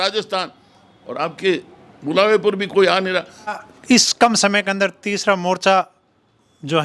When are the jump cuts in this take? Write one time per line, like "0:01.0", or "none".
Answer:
0:03.6

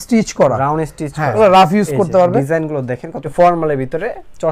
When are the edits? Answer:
0:01.4
0:03.2

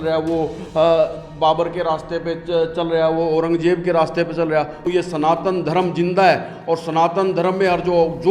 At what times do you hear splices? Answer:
0:04.8

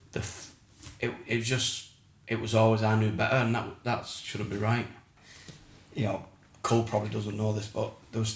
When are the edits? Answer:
0:05.2

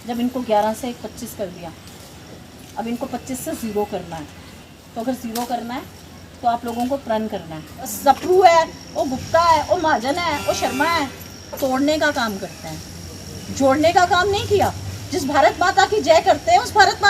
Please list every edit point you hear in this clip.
0:07.9

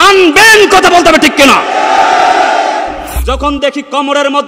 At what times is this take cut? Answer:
0:03.1

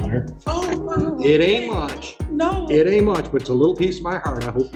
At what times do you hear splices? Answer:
none

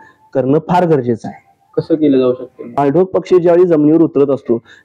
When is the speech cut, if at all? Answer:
0:02.8

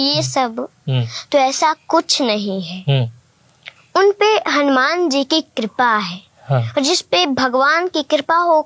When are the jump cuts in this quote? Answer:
none

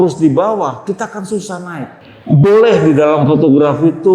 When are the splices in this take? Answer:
0:01.9

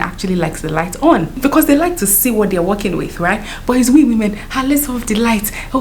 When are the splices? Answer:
0:01.4

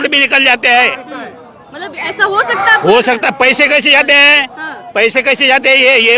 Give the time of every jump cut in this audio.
none

